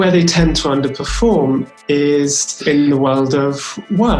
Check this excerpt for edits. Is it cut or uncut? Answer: cut